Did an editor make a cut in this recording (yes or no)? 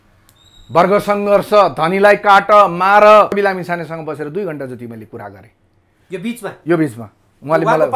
yes